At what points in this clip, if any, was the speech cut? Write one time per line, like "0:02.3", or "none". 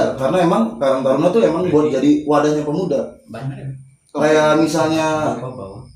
none